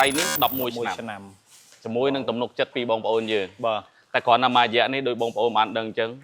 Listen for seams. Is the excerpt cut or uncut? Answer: uncut